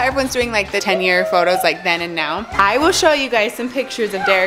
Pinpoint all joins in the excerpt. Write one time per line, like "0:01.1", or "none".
0:00.8
0:02.4